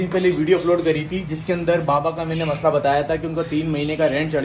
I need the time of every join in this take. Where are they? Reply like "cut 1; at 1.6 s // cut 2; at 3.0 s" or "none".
none